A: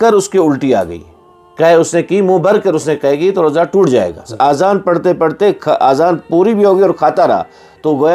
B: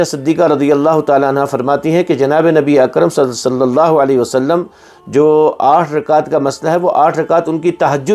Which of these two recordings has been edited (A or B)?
A